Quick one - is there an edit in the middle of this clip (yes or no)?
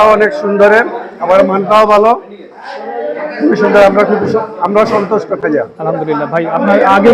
no